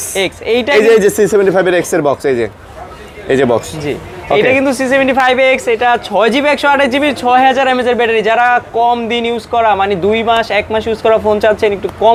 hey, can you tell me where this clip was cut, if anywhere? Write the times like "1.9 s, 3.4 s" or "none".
none